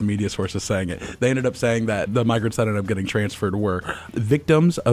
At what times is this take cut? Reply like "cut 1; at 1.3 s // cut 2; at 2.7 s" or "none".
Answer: cut 1; at 2.1 s // cut 2; at 4.1 s